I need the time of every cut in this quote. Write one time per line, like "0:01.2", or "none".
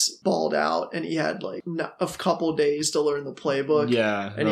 0:01.6